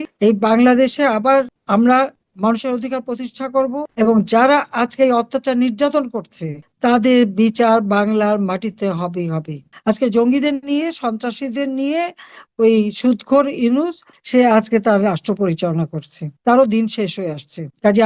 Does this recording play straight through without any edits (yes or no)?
no